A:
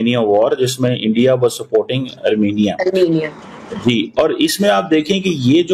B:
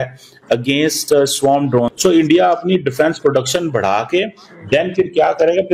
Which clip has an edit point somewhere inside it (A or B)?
B